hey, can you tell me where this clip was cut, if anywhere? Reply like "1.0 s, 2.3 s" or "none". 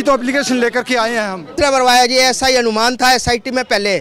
1.6 s